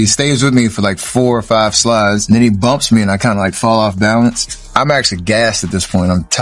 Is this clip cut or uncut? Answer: cut